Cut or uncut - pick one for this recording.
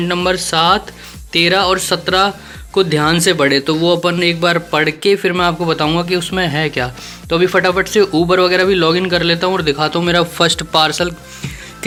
uncut